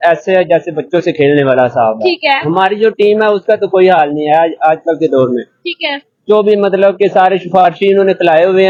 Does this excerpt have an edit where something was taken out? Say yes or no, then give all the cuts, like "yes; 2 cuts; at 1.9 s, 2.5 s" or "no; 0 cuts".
no; 0 cuts